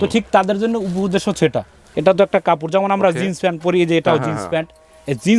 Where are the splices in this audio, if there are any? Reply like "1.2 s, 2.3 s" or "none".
1.8 s